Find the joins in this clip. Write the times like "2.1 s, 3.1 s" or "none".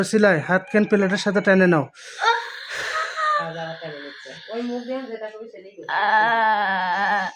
none